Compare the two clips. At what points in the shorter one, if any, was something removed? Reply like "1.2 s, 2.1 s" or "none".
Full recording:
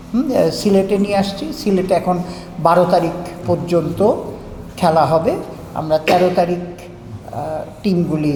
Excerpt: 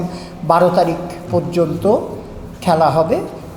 none